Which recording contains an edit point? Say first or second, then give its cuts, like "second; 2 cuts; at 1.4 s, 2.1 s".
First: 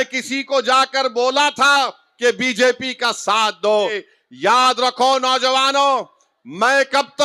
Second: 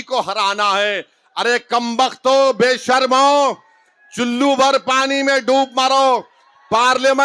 first; 1 cut; at 4.1 s